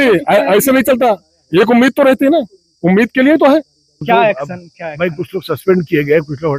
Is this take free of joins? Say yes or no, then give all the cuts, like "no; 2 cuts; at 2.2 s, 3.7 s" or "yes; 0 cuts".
no; 1 cut; at 4.0 s